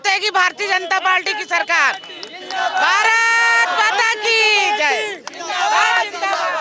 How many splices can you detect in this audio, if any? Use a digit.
0